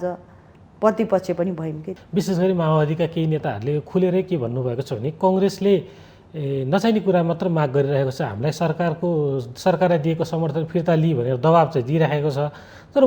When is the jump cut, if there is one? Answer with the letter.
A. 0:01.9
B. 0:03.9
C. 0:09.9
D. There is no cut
A